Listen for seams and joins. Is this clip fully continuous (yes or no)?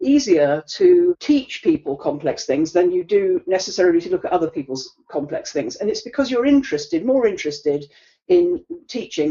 no